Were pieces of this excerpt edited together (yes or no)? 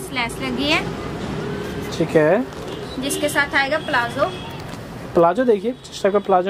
no